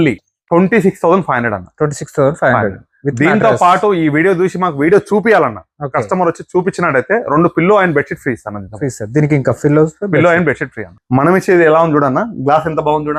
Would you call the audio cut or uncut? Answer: cut